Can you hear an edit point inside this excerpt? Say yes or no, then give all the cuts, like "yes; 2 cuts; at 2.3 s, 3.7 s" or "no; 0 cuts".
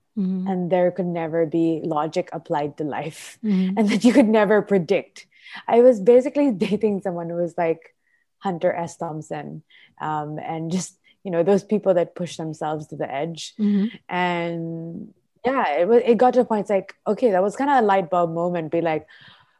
no; 0 cuts